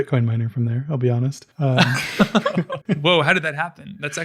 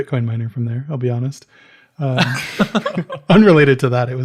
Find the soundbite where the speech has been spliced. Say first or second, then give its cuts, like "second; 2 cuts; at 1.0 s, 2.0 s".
first; 2 cuts; at 1.4 s, 2.8 s